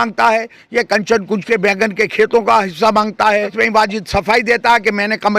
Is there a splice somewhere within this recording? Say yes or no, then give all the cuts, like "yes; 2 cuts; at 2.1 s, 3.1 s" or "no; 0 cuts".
yes; 1 cut; at 3.4 s